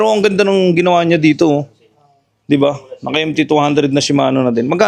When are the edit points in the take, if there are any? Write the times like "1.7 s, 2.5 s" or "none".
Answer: none

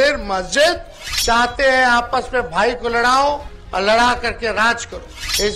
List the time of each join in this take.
none

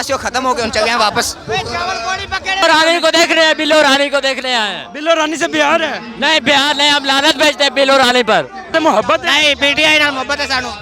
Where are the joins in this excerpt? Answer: 2.6 s, 8.7 s

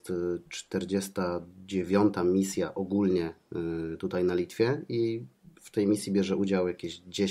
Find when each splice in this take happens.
none

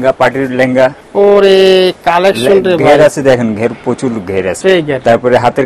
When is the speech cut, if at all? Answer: 1.0 s, 4.5 s

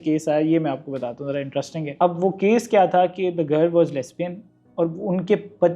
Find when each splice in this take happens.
1.9 s

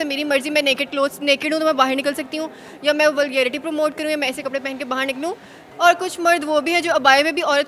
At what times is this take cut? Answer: 5.6 s

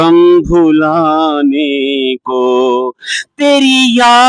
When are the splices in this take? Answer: none

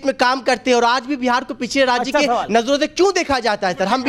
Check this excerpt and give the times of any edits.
none

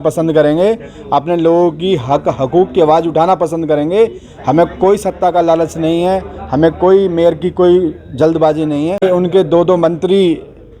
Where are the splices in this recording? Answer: 9.0 s

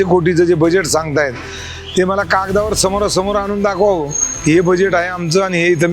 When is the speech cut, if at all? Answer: none

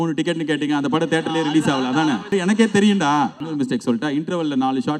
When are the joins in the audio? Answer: 2.3 s, 3.4 s

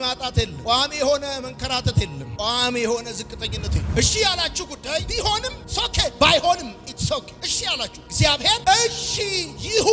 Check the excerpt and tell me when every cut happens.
3.7 s

